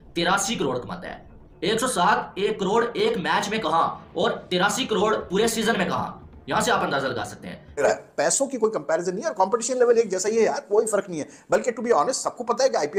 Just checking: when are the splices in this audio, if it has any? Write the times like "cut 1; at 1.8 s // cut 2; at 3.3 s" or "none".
none